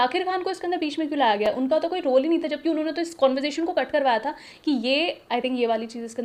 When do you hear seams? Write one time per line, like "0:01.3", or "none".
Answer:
none